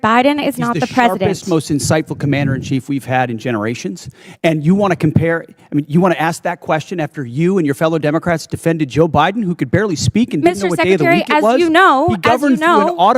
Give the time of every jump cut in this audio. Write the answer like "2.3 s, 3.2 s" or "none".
none